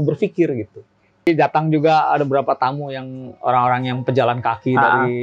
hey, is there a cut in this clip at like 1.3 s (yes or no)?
yes